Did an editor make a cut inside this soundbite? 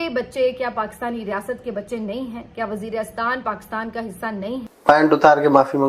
yes; 1 cut; at 4.7 s

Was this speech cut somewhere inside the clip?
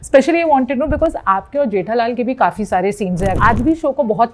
yes; 1 cut; at 3.4 s

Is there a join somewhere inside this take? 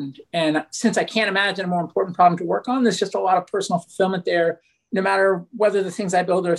yes; 1 cut; at 4.7 s

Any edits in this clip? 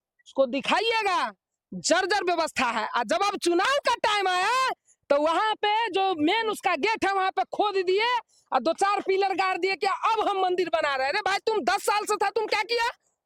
no; 0 cuts

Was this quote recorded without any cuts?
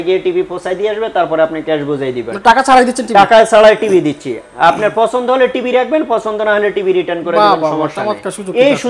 yes; 0 cuts

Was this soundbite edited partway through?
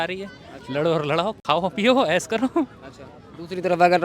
no; 0 cuts

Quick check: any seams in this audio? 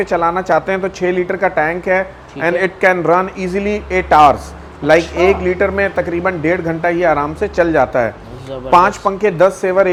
no; 0 cuts

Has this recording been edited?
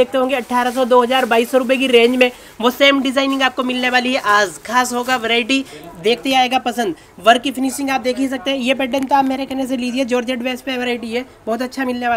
no; 0 cuts

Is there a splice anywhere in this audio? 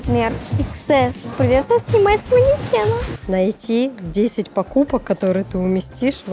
yes; 1 cut; at 3.1 s

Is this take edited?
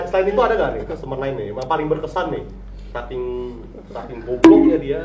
no; 0 cuts

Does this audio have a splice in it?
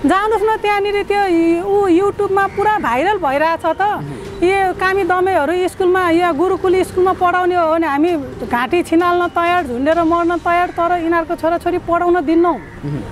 no; 0 cuts

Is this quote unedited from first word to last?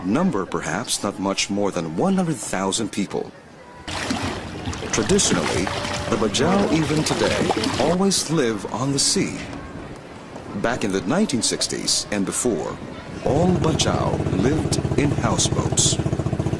no; 1 cut; at 4.9 s

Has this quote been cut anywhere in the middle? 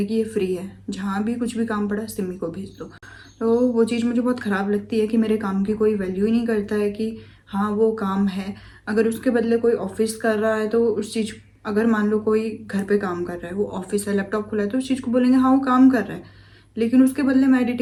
no; 0 cuts

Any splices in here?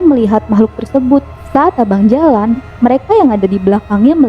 yes; 1 cut; at 1.4 s

